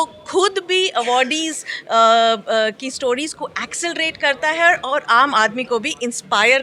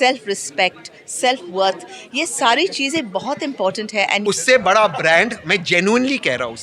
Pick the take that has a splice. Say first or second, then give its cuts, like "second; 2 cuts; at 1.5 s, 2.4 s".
second; 1 cut; at 4.2 s